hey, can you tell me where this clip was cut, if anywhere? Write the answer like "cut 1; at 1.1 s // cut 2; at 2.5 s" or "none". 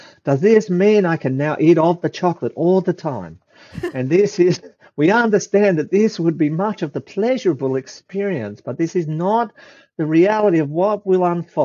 none